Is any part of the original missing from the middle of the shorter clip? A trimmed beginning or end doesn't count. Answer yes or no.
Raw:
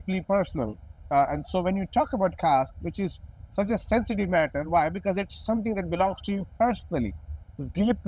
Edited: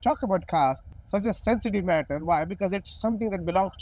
yes